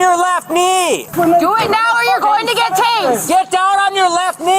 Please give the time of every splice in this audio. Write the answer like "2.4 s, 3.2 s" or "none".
1.1 s, 3.2 s